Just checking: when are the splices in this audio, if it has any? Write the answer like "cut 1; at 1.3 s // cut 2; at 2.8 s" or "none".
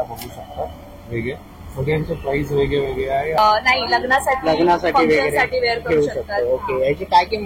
cut 1; at 3.4 s